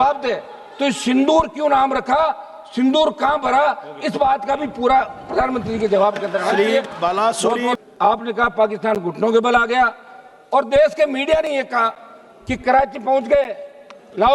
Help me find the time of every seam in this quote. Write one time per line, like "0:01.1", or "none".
0:07.9